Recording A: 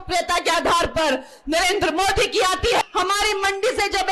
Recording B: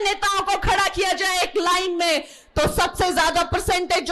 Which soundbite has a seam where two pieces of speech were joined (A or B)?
A